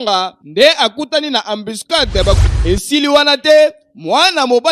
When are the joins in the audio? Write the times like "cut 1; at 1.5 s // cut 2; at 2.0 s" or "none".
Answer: cut 1; at 2.4 s